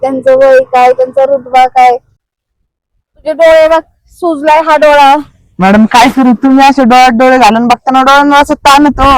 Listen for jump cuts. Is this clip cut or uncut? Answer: cut